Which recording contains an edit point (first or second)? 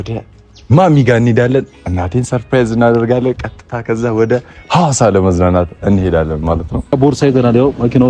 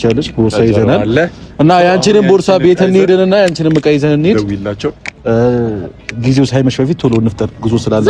first